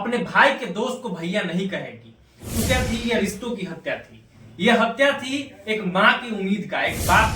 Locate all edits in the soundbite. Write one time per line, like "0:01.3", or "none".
0:02.7